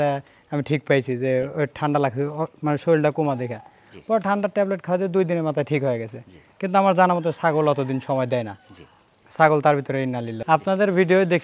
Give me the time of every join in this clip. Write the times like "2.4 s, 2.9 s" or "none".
10.4 s